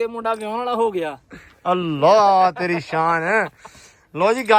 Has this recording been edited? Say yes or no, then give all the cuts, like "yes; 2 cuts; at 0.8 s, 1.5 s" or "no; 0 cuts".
no; 0 cuts